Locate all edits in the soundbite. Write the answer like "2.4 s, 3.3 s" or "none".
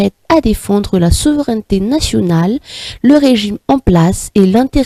none

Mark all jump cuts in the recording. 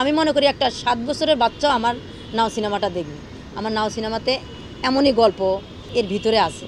5.8 s

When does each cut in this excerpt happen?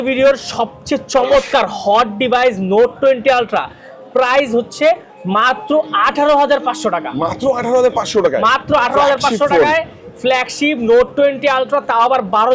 none

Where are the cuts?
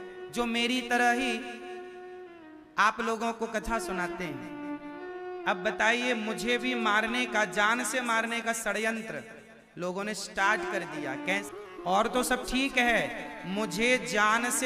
5.0 s, 11.4 s

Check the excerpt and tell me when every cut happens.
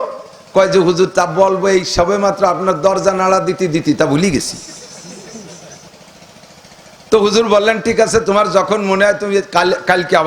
5.9 s

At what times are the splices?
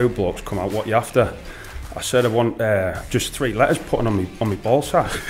none

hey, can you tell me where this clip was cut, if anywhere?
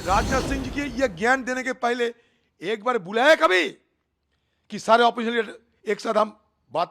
none

